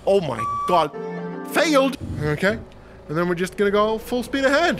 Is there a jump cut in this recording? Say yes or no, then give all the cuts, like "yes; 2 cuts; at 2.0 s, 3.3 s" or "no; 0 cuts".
yes; 1 cut; at 2.0 s